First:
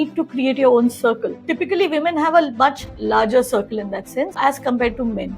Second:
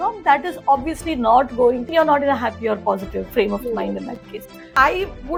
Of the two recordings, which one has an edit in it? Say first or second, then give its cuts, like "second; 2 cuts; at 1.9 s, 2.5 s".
first; 1 cut; at 1.4 s